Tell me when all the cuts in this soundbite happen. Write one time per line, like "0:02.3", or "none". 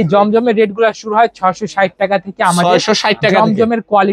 none